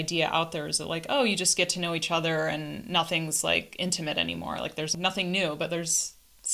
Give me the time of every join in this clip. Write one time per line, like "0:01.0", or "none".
0:04.9